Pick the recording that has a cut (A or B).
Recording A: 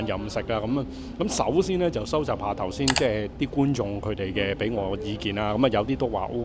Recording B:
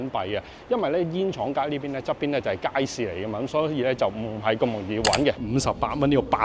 B